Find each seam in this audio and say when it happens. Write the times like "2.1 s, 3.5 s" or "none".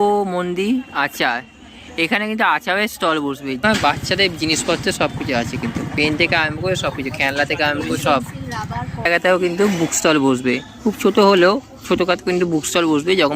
3.6 s, 9.1 s